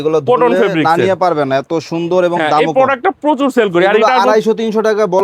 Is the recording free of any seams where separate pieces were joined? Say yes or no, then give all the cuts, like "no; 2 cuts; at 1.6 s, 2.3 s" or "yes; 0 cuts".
yes; 0 cuts